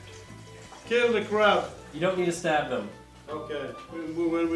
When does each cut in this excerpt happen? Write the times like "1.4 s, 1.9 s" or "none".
1.8 s